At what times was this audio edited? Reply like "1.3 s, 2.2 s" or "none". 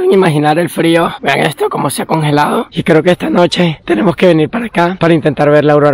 1.2 s, 2.7 s